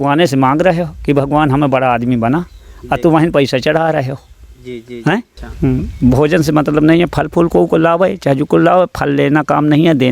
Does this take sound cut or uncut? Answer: cut